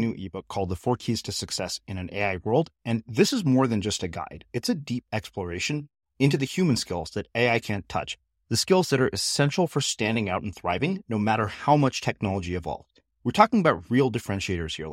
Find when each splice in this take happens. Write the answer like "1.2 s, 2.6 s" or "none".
none